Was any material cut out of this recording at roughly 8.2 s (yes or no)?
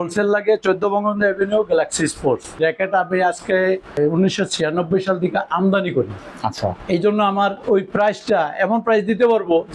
no